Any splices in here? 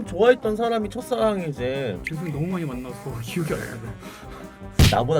no; 0 cuts

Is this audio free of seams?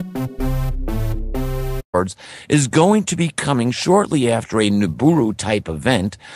no; 1 cut; at 1.8 s

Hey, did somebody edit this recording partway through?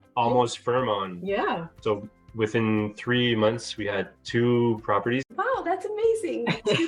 yes; 2 cuts; at 1.7 s, 5.2 s

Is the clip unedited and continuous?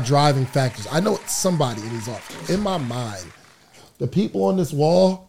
yes; 0 cuts

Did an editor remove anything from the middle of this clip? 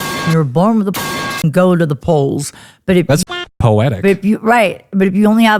no; 0 cuts

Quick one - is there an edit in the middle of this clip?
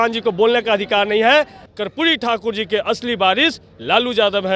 yes; 1 cut; at 1.6 s

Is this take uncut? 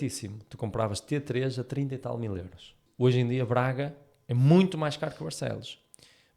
no; 1 cut; at 2.8 s

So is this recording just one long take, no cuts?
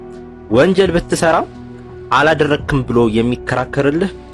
yes; 0 cuts

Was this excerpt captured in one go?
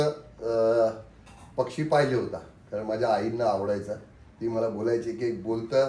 yes; 0 cuts

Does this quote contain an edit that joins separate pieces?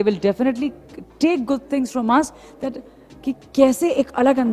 no; 0 cuts

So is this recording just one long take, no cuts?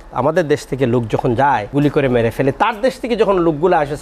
no; 1 cut; at 1.7 s

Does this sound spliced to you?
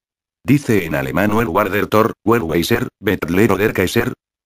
yes; 1 cut; at 1.4 s

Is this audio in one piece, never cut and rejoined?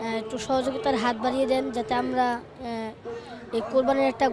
yes; 0 cuts

